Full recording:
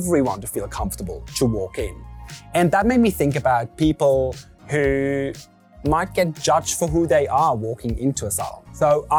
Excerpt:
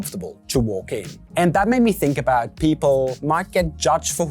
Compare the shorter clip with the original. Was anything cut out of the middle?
yes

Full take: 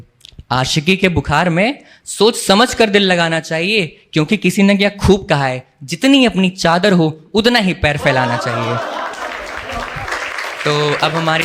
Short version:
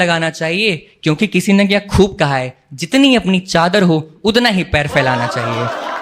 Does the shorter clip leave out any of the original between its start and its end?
no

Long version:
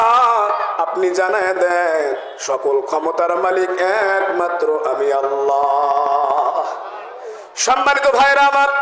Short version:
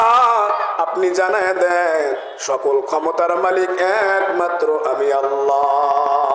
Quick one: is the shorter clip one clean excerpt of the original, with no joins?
yes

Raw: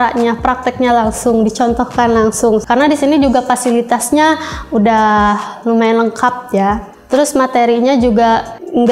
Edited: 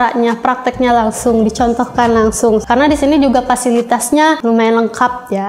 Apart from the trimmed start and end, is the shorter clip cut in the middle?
yes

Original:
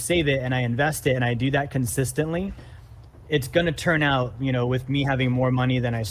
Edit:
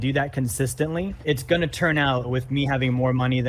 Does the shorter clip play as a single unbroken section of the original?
no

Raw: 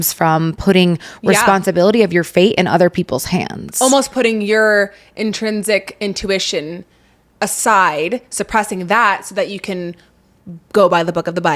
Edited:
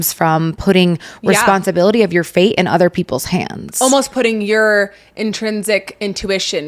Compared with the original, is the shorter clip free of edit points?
yes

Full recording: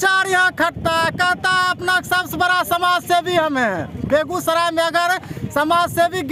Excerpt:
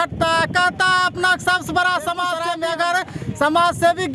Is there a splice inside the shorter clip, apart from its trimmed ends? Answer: yes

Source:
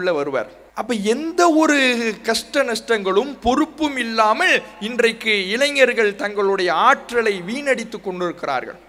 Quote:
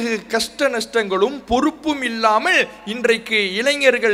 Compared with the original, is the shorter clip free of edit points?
yes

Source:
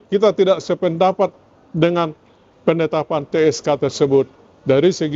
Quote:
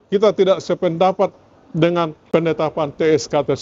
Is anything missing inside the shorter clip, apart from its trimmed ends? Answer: yes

